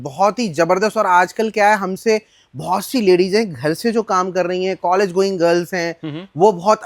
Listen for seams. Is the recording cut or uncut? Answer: uncut